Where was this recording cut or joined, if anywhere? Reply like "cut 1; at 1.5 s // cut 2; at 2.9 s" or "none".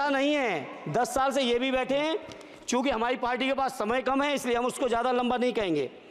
none